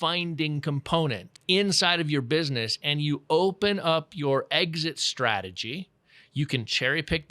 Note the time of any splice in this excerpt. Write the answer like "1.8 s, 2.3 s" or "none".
1.3 s